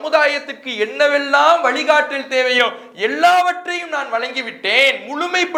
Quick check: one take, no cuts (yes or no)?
yes